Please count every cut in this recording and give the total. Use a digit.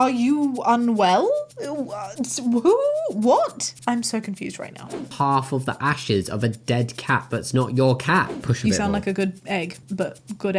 3